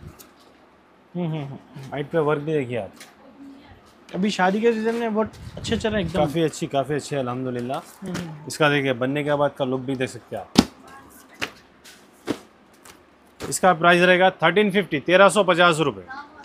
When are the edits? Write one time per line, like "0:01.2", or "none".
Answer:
none